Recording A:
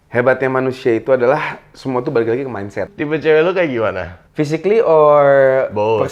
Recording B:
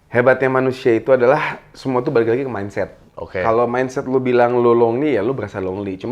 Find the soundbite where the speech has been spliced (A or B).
A